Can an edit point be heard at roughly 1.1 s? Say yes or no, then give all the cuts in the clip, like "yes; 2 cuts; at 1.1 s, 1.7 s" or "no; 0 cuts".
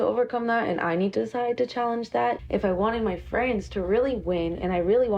yes; 2 cuts; at 1.1 s, 2.4 s